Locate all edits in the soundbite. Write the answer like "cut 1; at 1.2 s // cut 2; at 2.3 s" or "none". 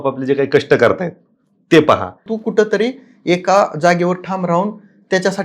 cut 1; at 2.4 s